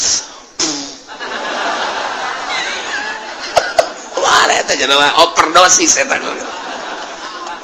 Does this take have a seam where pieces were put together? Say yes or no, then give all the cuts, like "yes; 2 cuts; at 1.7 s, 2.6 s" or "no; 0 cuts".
no; 0 cuts